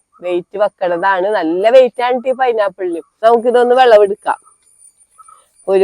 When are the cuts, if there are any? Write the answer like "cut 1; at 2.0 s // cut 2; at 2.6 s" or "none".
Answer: cut 1; at 3.1 s